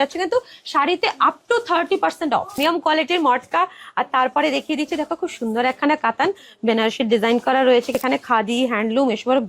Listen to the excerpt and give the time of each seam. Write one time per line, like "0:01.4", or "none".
0:02.6
0:08.0